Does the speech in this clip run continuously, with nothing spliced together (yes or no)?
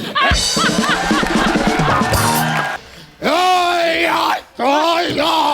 no